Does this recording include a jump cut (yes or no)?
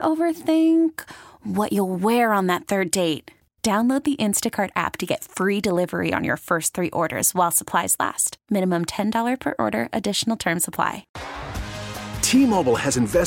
yes